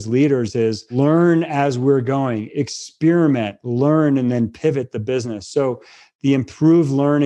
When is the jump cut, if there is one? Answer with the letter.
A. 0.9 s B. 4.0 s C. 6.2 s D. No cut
A